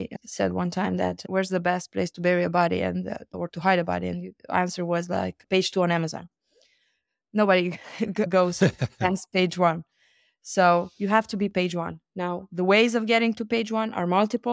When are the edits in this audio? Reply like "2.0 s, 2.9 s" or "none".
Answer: 1.2 s